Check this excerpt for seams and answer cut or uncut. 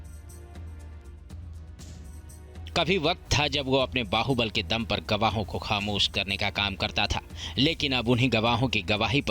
cut